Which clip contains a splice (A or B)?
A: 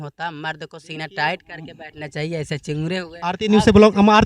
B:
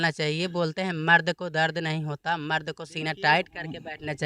A